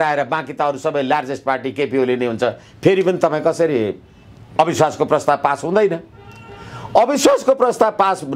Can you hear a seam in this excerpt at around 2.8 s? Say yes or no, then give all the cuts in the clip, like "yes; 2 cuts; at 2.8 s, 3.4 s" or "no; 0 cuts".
no; 1 cut; at 4.5 s